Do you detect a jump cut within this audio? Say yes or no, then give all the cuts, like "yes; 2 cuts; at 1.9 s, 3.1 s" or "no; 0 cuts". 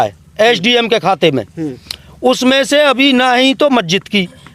no; 0 cuts